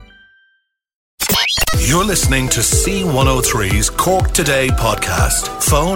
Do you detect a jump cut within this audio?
yes; 1 cut; at 1.1 s

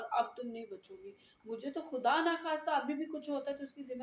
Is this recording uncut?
yes; 0 cuts

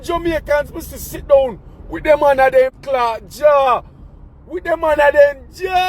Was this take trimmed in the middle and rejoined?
yes; 1 cut; at 2.8 s

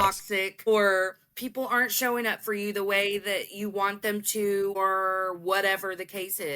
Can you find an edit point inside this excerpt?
yes; 2 cuts; at 0.7 s, 4.8 s

